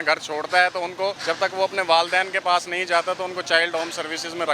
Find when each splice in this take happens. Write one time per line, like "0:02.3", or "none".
0:01.2